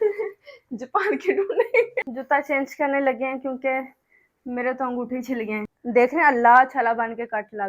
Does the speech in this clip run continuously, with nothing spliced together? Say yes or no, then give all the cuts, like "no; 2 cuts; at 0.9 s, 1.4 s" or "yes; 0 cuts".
no; 2 cuts; at 1.9 s, 5.7 s